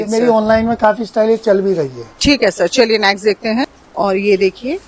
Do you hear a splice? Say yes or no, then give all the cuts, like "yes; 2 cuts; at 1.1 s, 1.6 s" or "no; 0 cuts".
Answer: yes; 1 cut; at 3.7 s